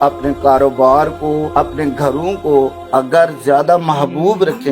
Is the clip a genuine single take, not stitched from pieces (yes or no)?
no